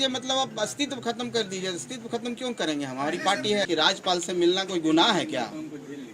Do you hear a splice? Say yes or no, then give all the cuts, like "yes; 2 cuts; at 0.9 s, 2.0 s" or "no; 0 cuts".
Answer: yes; 1 cut; at 3.7 s